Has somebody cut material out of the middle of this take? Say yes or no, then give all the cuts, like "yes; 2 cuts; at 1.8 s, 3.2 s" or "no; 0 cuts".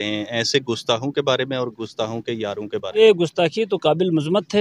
yes; 1 cut; at 3.0 s